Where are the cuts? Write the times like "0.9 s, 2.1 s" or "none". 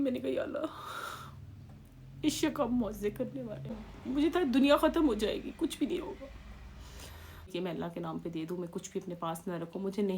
3.9 s, 7.5 s